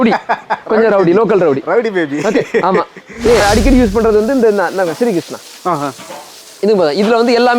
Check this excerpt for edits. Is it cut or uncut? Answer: cut